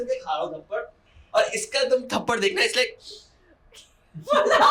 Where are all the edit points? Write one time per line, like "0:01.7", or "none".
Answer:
none

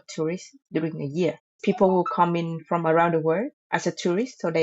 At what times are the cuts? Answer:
0:01.6
0:03.6

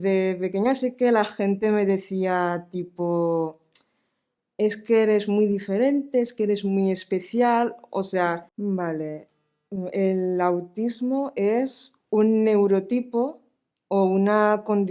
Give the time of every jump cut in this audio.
0:08.5

